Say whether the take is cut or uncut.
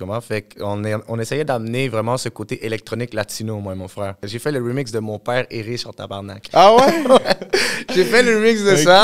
cut